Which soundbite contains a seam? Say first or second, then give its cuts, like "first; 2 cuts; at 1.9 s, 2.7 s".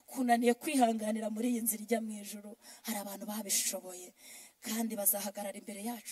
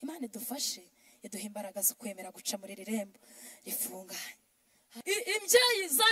second; 1 cut; at 4.9 s